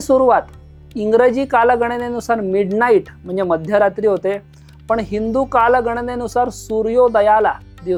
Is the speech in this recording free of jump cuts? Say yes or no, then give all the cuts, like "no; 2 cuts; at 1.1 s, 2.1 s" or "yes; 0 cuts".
yes; 0 cuts